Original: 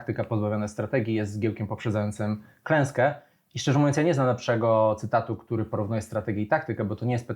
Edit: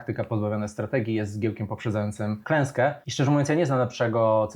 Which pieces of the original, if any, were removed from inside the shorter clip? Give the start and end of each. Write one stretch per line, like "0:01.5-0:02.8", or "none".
0:02.4-0:02.6
0:03.2-0:03.5